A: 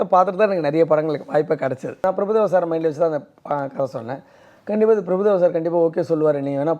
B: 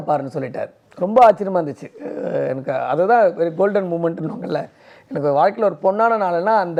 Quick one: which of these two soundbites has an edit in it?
A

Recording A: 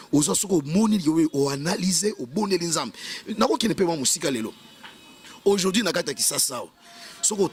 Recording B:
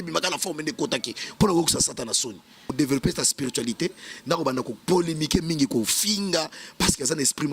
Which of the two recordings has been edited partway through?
B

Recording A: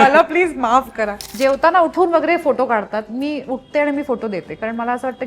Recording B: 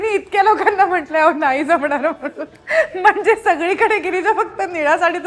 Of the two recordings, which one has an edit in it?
A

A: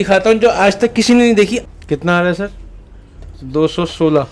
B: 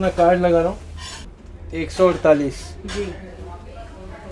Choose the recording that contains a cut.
A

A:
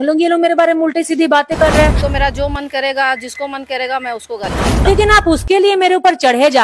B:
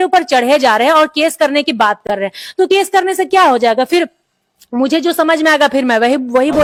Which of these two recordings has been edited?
A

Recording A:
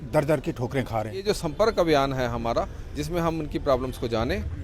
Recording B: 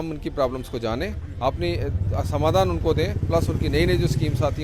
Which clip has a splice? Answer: A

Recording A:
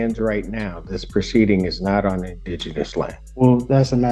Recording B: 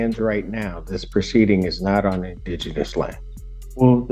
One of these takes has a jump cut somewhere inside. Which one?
A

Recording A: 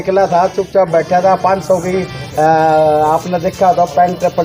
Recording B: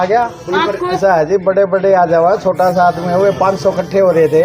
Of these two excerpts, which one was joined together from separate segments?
B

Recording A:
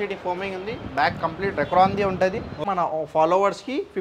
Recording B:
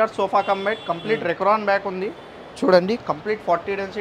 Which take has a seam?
A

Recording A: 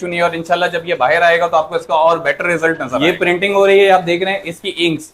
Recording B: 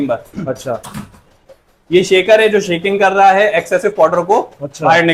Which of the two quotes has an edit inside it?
A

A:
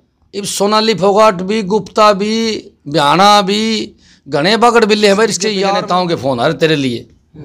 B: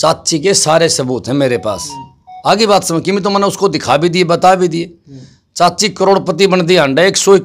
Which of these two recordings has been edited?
A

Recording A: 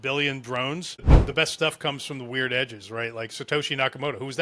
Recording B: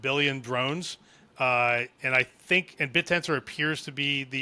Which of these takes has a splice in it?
A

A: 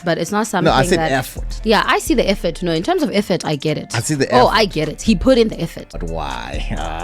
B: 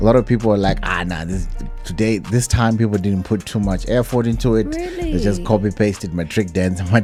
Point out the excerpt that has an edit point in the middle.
A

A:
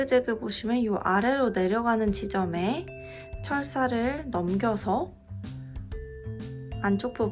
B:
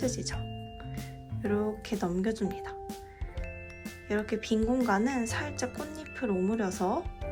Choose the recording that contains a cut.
A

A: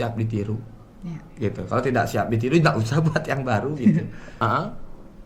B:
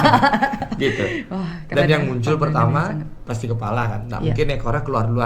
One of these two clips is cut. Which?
A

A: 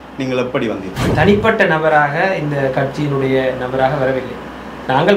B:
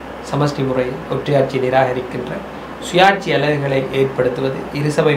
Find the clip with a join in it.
A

